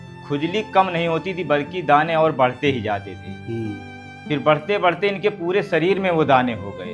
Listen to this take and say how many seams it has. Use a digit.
0